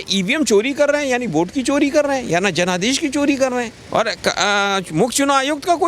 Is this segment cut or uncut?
cut